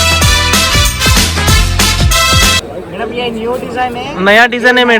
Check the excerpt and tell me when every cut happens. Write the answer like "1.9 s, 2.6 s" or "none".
2.6 s